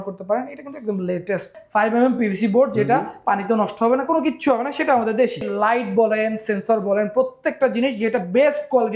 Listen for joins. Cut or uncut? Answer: cut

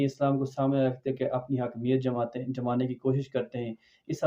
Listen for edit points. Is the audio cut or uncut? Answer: uncut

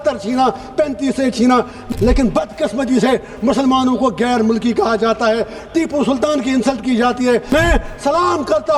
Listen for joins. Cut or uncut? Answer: cut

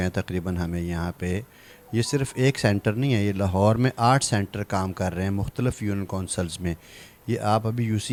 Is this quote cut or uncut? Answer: uncut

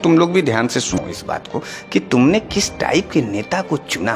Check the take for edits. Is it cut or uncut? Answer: cut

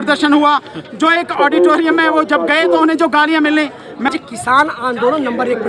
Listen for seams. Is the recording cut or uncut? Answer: cut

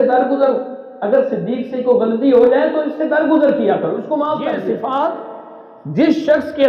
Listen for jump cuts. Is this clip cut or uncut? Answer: cut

